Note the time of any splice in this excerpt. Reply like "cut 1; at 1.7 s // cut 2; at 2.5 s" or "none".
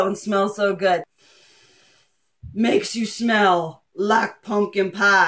cut 1; at 1.2 s